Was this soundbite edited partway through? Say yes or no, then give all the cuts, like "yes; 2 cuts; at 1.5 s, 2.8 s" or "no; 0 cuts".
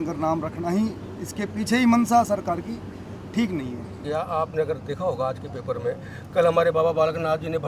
yes; 1 cut; at 4.1 s